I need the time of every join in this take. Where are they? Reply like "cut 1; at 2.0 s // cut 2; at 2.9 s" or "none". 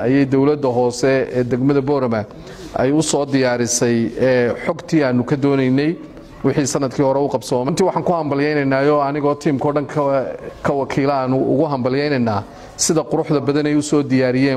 cut 1; at 7.7 s // cut 2; at 10.4 s